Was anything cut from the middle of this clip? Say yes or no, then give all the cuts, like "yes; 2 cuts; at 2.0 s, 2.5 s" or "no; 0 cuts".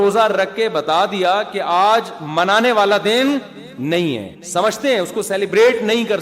yes; 1 cut; at 4.3 s